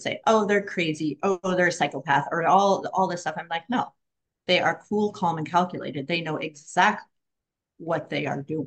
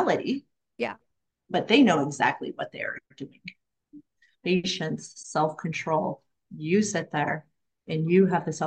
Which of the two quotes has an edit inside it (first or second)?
second